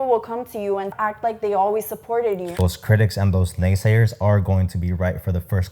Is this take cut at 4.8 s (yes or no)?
no